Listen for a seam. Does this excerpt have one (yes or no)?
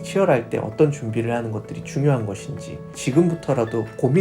yes